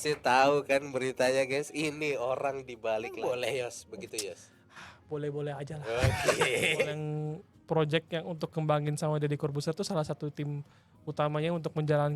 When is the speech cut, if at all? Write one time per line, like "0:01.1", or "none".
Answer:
0:03.1
0:07.0